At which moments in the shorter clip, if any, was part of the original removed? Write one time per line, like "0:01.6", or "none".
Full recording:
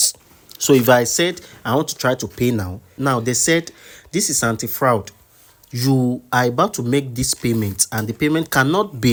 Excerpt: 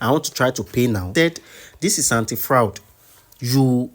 0:01.1